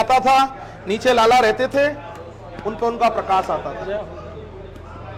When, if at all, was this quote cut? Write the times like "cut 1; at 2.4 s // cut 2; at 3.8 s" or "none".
none